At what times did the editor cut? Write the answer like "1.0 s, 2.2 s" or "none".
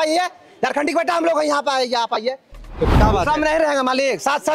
2.9 s